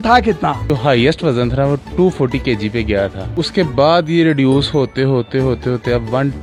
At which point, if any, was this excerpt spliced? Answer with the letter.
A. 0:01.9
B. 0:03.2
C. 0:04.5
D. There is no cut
D